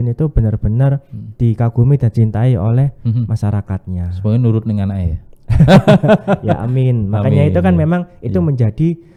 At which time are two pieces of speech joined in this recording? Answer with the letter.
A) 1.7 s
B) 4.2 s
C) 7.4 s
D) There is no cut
D